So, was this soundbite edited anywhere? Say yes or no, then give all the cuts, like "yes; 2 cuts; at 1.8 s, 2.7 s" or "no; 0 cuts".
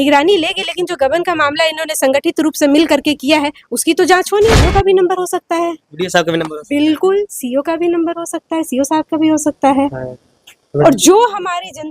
yes; 1 cut; at 4.7 s